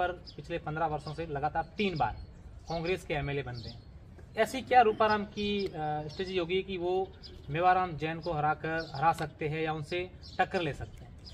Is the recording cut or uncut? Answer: uncut